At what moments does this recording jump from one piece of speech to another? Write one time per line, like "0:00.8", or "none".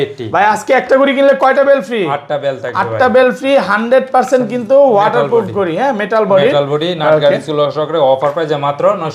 none